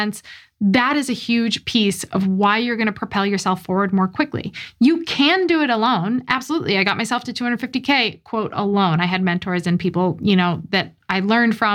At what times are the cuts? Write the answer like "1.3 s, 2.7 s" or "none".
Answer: none